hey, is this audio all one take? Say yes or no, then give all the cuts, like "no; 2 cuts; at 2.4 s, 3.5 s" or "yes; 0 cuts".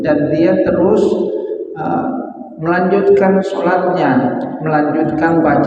yes; 0 cuts